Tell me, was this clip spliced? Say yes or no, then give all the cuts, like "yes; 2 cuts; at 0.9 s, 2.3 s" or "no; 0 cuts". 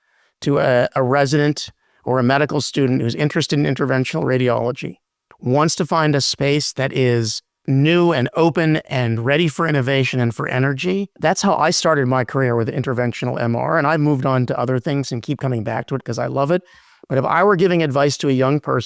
yes; 1 cut; at 0.9 s